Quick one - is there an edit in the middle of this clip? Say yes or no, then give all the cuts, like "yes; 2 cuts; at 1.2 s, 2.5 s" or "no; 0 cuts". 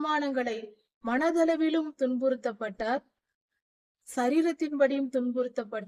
no; 0 cuts